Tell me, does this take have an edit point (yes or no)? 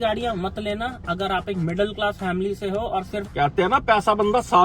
yes